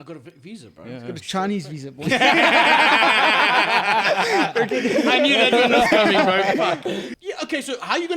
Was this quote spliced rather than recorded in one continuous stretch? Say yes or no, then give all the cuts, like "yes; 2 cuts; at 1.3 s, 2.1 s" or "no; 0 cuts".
yes; 1 cut; at 7.0 s